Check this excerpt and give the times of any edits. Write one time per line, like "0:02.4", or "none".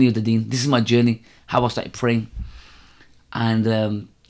none